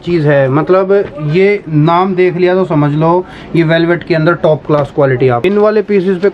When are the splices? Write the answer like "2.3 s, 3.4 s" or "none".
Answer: 5.4 s